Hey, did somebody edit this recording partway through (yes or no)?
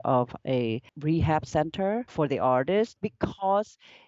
yes